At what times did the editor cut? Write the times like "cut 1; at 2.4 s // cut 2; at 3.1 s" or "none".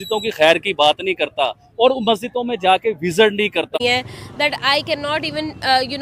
cut 1; at 3.8 s

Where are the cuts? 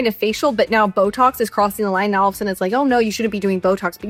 none

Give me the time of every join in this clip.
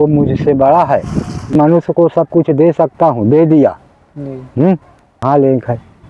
cut 1; at 1.5 s // cut 2; at 5.2 s

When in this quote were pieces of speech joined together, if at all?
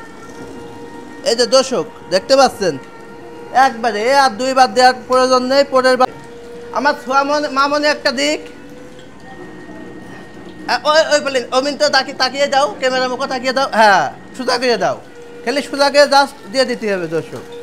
cut 1; at 6.0 s

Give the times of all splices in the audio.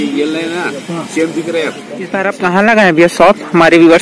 cut 1; at 2.2 s

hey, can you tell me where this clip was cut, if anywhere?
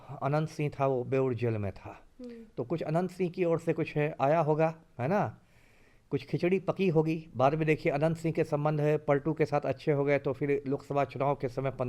none

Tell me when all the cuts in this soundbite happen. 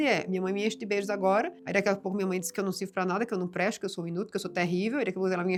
none

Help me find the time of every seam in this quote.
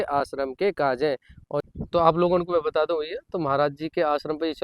cut 1; at 1.6 s

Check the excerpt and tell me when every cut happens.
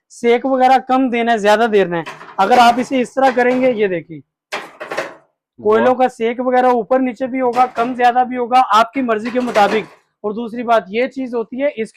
none

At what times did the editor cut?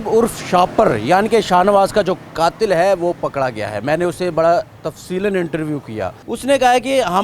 cut 1; at 6.2 s

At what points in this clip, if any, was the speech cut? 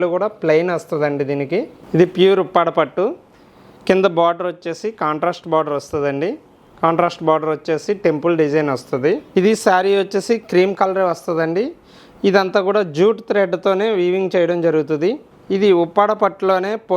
cut 1; at 1.8 s // cut 2; at 9.2 s // cut 3; at 15.3 s

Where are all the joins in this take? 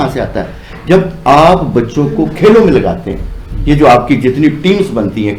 none

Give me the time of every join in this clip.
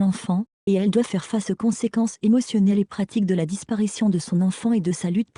none

